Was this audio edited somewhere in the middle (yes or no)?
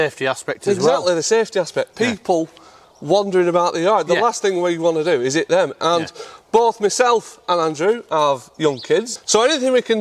yes